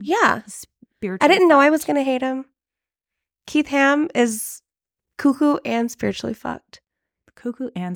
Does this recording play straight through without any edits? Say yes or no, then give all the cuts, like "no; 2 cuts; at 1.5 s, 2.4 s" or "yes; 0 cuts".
yes; 0 cuts